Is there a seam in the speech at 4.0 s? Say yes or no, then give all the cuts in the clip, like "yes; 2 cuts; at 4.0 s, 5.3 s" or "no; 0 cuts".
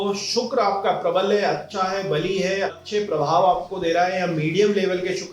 no; 1 cut; at 2.8 s